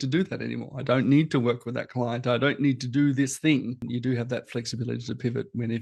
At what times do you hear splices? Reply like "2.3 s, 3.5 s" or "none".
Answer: 3.8 s